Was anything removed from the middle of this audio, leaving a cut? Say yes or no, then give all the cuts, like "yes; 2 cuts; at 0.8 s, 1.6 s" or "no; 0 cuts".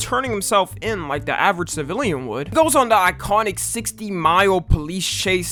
no; 0 cuts